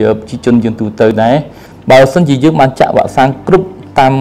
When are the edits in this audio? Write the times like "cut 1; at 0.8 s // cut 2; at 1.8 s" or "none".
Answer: cut 1; at 1.2 s